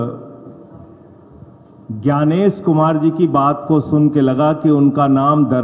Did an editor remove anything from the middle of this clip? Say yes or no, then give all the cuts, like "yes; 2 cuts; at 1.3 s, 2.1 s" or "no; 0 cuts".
no; 0 cuts